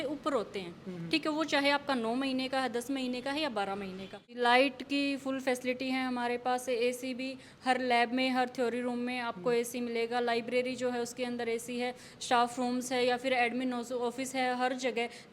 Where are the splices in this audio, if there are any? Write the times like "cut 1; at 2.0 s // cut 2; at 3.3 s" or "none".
cut 1; at 4.3 s